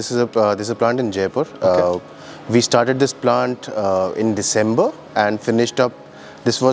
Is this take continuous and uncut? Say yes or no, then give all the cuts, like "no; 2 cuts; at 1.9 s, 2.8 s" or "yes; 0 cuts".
yes; 0 cuts